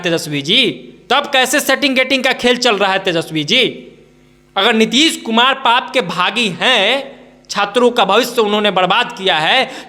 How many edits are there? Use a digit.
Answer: 0